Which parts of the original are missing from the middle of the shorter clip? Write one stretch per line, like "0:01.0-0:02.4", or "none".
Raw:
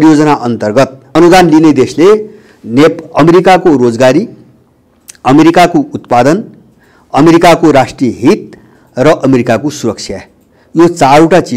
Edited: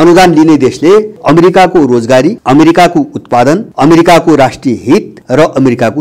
0:02.3-0:03.1
0:04.3-0:05.2
0:06.5-0:07.0
0:08.5-0:08.8